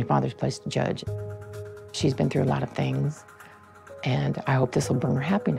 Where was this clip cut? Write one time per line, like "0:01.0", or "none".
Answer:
none